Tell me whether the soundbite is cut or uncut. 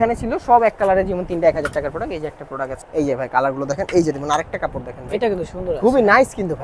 cut